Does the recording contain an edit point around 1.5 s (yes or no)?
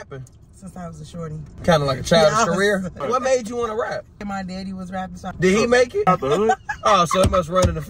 yes